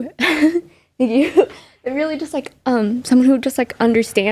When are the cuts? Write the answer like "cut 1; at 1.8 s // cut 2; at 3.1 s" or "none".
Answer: none